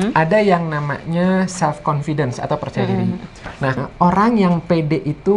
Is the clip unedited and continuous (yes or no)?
no